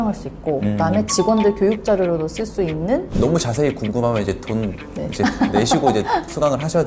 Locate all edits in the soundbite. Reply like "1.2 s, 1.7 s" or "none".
3.1 s